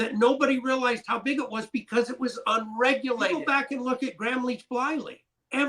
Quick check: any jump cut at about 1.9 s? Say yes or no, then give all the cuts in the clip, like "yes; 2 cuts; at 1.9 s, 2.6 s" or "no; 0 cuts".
no; 1 cut; at 3.5 s